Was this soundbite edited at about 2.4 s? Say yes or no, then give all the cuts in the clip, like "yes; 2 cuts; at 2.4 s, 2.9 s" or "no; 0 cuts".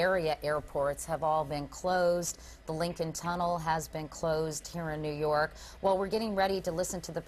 yes; 1 cut; at 2.4 s